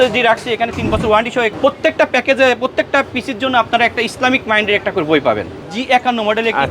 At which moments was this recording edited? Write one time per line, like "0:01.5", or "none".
0:01.5
0:05.7